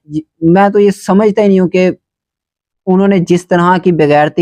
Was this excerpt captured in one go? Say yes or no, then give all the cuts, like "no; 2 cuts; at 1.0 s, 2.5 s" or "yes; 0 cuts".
yes; 0 cuts